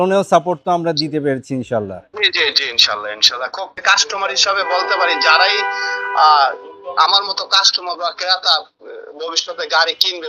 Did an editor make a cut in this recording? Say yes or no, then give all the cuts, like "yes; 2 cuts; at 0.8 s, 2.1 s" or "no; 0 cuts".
yes; 2 cuts; at 2.1 s, 3.8 s